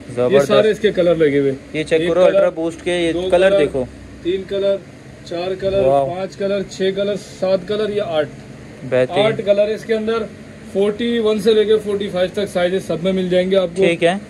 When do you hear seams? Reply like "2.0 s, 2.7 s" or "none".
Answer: none